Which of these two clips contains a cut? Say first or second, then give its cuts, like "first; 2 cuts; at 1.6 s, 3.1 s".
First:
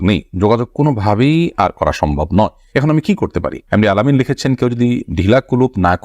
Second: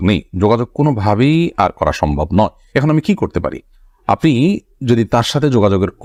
first; 1 cut; at 3.6 s